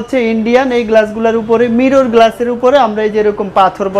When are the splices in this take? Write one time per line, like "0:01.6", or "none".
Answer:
none